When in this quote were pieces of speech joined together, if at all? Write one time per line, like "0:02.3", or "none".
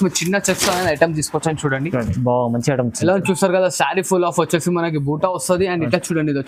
none